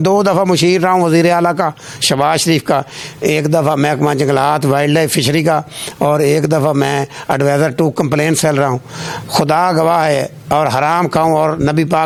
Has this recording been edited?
no; 0 cuts

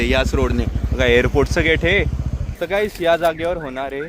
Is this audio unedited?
no; 1 cut; at 2.5 s

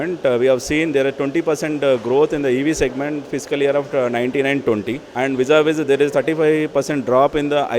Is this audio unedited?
no; 1 cut; at 5.0 s

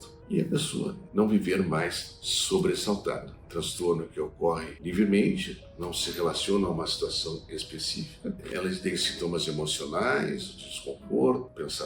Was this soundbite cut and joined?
yes; 3 cuts; at 3.3 s, 4.7 s, 8.4 s

